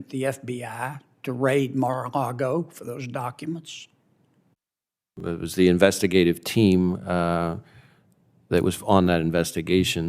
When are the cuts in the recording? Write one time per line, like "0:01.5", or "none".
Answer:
0:05.2